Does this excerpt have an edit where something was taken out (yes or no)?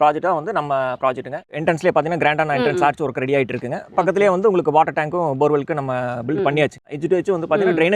yes